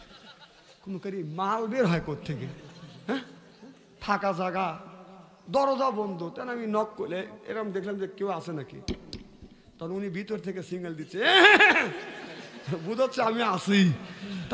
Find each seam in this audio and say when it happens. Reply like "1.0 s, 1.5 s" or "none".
none